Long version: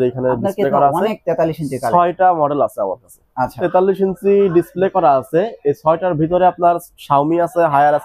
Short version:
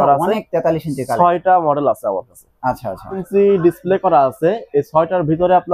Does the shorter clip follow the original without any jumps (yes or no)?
no